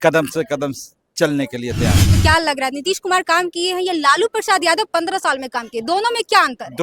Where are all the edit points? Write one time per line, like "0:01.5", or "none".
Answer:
0:02.1